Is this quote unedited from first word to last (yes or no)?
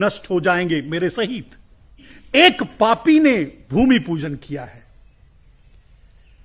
no